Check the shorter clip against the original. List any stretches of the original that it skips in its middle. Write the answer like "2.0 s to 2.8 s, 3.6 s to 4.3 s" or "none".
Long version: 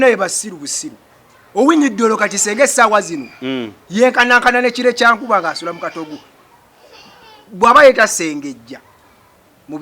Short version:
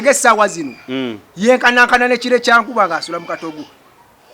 none

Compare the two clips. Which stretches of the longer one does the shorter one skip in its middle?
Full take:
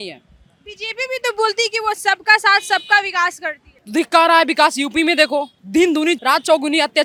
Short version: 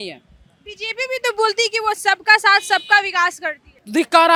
none

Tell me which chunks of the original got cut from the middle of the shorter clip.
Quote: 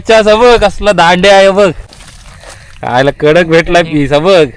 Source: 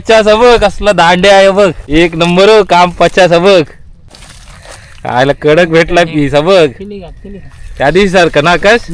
1.8 s to 4.0 s

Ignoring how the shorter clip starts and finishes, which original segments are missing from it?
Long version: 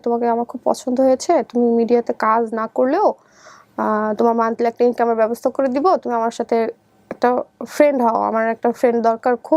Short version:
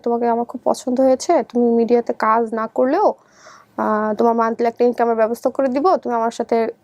none

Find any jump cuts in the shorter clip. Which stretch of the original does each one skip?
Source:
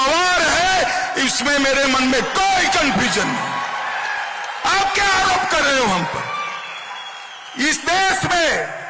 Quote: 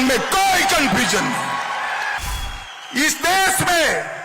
4.2 s to 6.8 s

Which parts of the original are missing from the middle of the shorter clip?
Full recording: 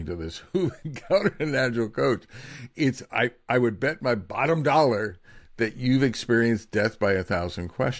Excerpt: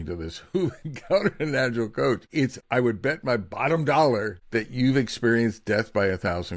2.6 s to 3.4 s, 5.2 s to 5.4 s

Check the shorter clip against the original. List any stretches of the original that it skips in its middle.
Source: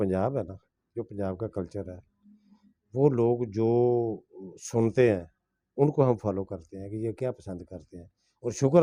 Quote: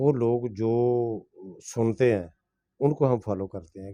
none

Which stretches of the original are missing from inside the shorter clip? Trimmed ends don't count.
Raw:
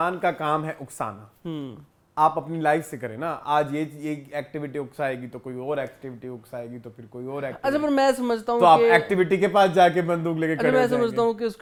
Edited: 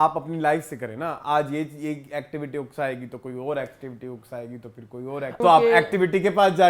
7.6 s to 8.6 s

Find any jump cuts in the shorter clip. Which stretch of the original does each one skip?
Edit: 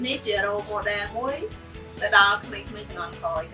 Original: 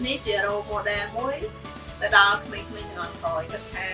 none

